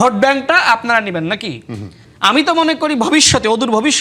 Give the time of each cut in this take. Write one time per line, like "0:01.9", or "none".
0:02.0